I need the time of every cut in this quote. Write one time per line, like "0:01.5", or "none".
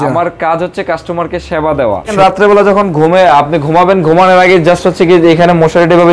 0:02.1